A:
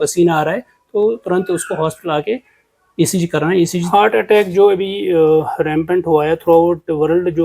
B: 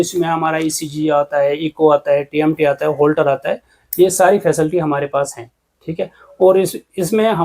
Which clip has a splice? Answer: A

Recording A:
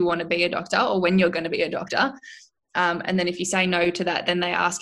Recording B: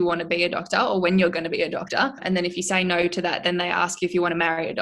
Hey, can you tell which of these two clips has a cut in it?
B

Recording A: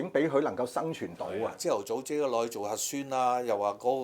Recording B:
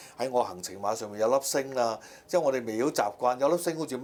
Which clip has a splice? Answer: A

